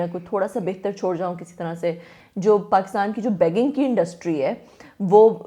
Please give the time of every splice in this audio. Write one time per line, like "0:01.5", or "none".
0:02.2